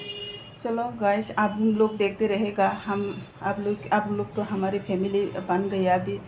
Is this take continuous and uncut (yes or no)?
yes